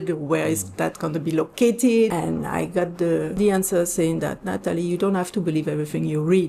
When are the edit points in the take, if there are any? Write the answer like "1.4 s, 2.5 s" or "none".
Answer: 2.1 s, 3.3 s